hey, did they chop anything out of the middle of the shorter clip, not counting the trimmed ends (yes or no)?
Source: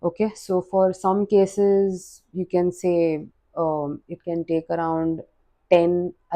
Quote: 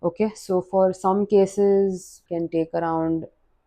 yes